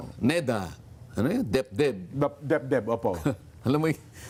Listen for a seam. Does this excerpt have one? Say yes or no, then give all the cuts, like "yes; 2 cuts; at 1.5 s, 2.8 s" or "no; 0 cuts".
no; 0 cuts